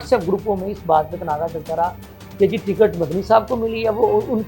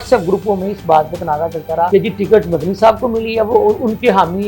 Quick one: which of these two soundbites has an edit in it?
second; 1 cut; at 1.9 s

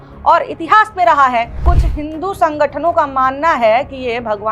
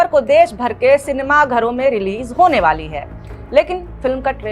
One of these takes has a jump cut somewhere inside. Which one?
first; 1 cut; at 1.7 s

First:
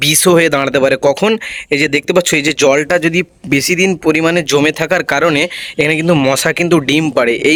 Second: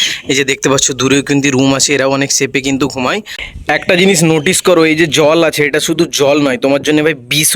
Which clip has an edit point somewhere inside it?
second; 1 cut; at 3.6 s

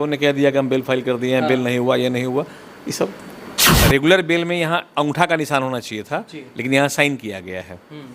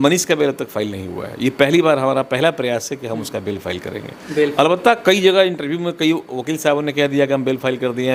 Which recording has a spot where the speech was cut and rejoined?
first; 1 cut; at 3.8 s

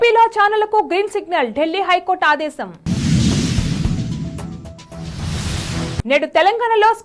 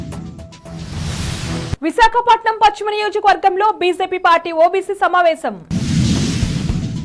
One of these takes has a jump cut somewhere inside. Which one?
second; 1 cut; at 1.2 s

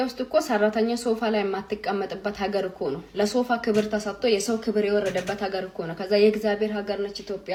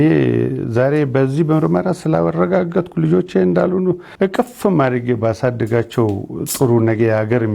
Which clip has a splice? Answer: second; 1 cut; at 4.1 s

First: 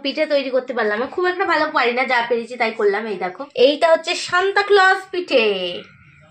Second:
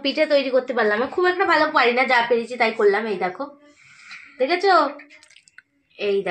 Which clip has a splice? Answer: first; 1 cut; at 3.4 s

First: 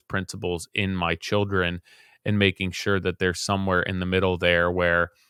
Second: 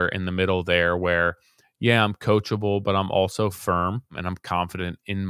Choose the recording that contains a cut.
second; 1 cut; at 4.3 s

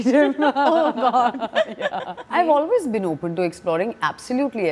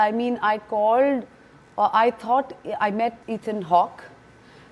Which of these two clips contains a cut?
first; 1 cut; at 2.2 s

